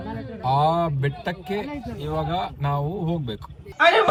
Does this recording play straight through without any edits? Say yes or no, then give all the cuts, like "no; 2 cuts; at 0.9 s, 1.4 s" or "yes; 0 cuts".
yes; 0 cuts